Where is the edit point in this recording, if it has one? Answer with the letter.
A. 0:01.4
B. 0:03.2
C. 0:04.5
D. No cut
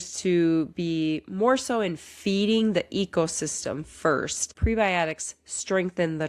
C